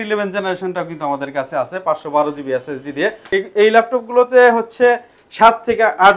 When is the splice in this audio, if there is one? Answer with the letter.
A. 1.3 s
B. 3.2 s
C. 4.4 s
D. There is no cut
B